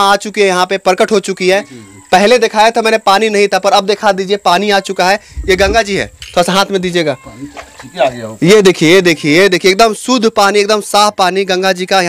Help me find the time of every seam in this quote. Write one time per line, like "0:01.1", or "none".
none